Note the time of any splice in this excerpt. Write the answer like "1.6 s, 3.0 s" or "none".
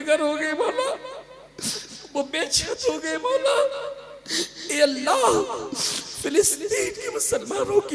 none